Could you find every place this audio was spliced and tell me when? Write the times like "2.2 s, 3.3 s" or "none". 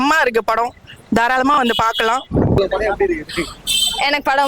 2.6 s